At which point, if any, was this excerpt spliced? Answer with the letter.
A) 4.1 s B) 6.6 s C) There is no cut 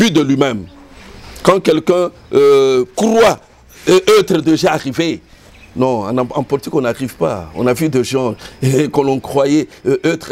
C